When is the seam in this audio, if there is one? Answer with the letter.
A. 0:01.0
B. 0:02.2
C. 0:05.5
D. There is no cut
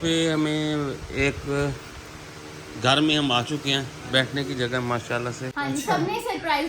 C